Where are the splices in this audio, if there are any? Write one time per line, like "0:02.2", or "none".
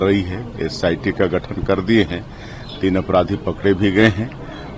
none